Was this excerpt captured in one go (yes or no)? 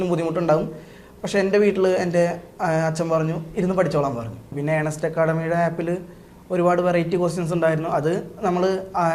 no